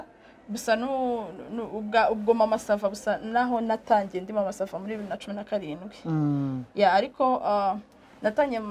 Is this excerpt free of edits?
yes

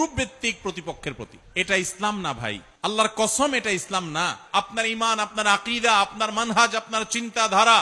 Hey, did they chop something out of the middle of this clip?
yes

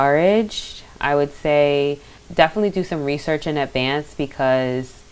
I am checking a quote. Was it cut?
yes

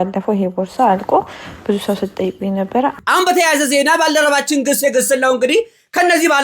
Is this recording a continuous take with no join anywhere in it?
no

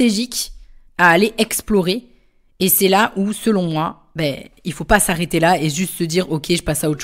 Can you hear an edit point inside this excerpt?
no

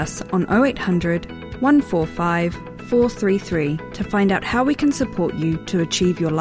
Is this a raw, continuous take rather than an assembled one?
yes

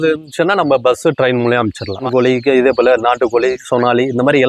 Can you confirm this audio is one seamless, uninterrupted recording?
no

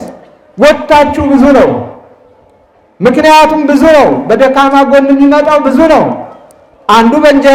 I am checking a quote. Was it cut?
no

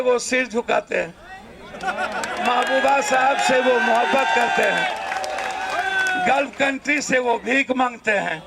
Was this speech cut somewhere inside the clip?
no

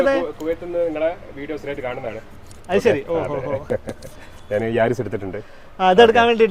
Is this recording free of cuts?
yes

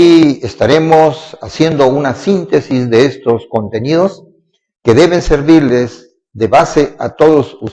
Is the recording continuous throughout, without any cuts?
yes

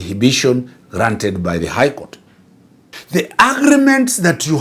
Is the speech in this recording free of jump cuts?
no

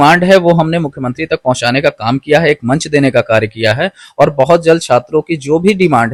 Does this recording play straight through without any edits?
yes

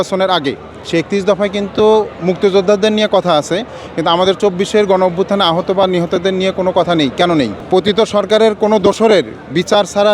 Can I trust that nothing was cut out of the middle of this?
no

